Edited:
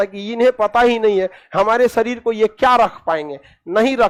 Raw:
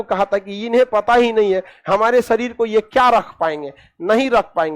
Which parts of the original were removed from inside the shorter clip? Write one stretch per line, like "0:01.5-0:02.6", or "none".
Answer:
none